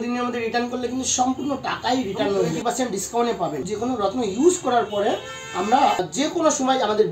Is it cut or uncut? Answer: cut